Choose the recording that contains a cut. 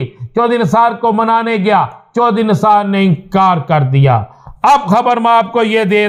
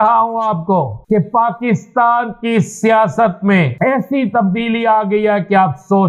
second; 2 cuts; at 1.0 s, 3.7 s

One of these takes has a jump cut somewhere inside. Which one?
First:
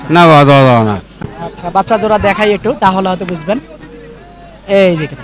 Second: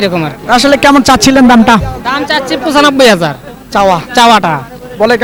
first; 1 cut; at 1.2 s

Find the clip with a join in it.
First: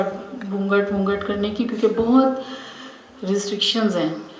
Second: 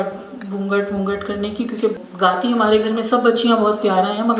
second; 1 cut; at 1.9 s

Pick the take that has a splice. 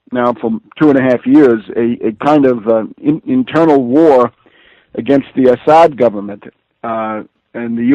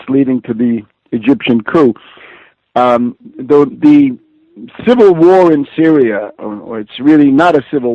second; 1 cut; at 3.2 s

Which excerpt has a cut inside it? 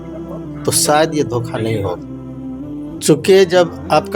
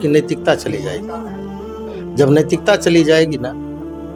first; 1 cut; at 3.0 s

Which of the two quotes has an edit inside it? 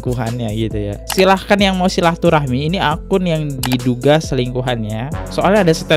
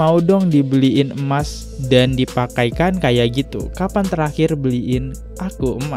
first; 1 cut; at 1.0 s

